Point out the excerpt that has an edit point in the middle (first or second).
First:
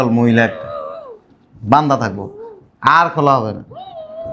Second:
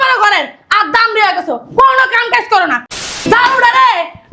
second